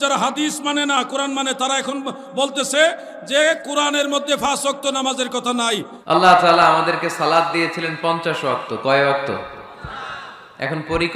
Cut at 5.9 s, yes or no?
yes